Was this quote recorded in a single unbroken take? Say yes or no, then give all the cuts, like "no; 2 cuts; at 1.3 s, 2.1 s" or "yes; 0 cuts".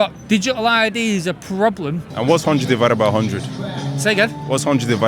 no; 1 cut; at 2.1 s